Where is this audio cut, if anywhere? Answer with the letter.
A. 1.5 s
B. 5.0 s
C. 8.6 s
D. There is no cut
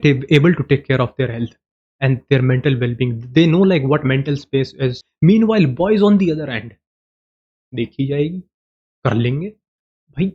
B